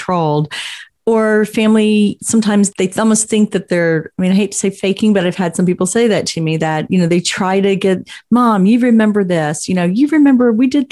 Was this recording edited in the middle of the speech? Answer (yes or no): no